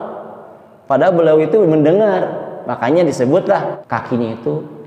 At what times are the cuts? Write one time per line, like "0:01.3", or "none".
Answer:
0:03.7